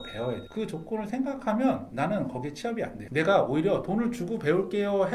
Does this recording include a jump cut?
no; 0 cuts

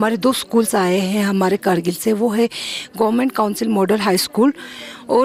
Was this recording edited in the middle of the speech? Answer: no; 0 cuts

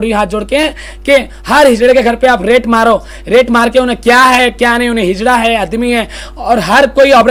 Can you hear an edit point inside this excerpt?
no; 0 cuts

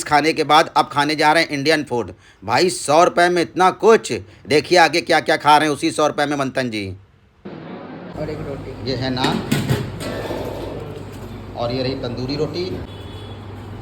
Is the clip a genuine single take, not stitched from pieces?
no; 1 cut; at 12.9 s

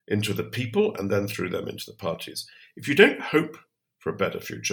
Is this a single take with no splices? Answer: yes; 0 cuts

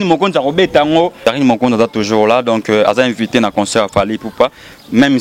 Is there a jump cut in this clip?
yes; 1 cut; at 1.2 s

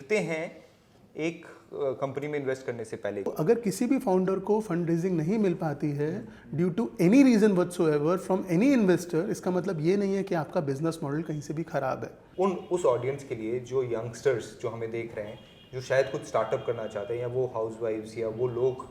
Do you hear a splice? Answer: yes; 2 cuts; at 3.3 s, 12.2 s

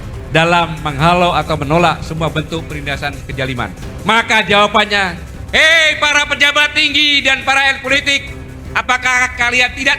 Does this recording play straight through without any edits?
no; 1 cut; at 3.8 s

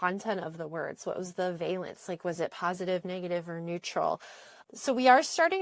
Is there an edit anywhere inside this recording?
no; 0 cuts

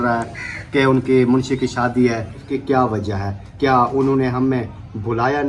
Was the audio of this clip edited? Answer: yes; 1 cut; at 2.5 s

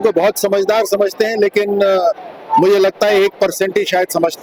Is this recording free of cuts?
yes; 0 cuts

